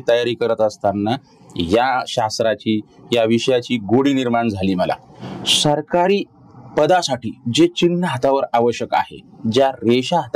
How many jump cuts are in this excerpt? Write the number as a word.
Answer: one